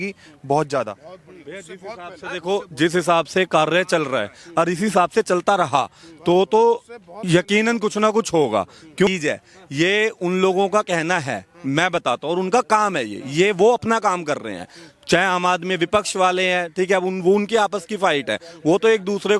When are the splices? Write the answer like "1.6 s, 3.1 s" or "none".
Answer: 9.1 s